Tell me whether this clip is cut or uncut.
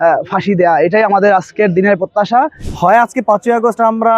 cut